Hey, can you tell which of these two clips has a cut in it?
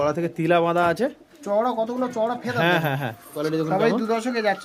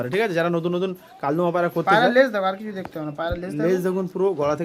first; 1 cut; at 3.4 s

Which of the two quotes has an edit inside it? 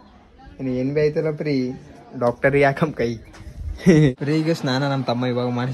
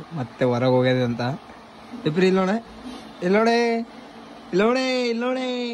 first; 1 cut; at 4.2 s

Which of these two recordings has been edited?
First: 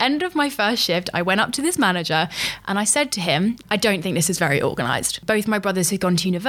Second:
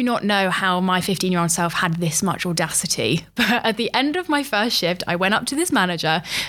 first; 2 cuts; at 3.6 s, 5.1 s

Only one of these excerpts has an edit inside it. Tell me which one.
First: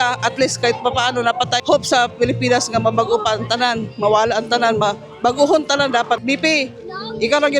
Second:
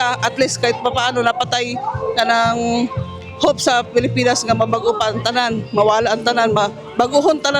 first; 2 cuts; at 1.6 s, 6.2 s

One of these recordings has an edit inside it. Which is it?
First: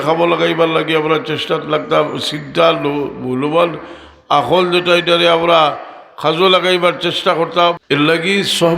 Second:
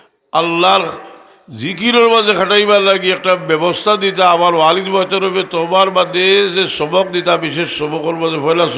first; 1 cut; at 7.8 s

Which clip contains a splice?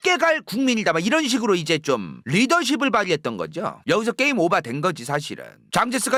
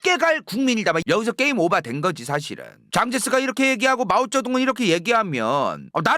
second; 1 cut; at 1.0 s

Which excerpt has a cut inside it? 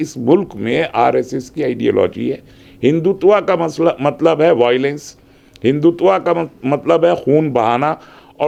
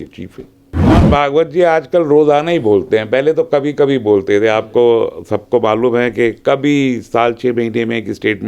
second; 1 cut; at 1.0 s

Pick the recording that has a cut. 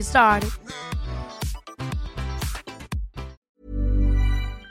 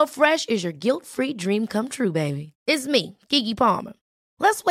first; 1 cut; at 3.4 s

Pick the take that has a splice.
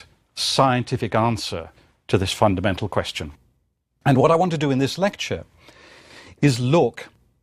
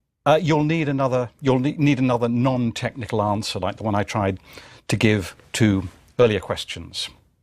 second; 1 cut; at 1.3 s

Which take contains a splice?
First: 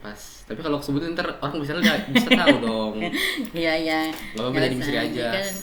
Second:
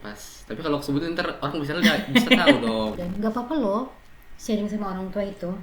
second; 1 cut; at 2.9 s

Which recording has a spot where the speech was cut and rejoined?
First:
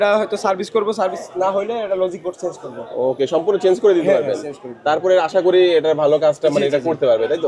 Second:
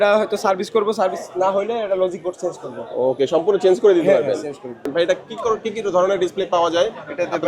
second; 1 cut; at 4.8 s

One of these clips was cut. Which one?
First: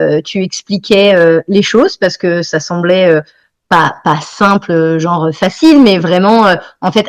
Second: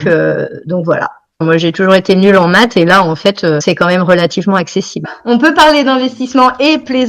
second; 3 cuts; at 1.4 s, 3.6 s, 5.1 s

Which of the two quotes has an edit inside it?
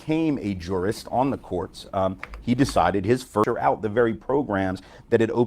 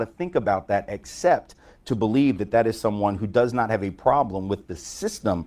first; 1 cut; at 3.4 s

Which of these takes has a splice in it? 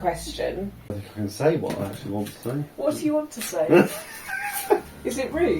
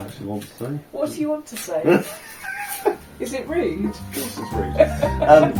first; 1 cut; at 0.9 s

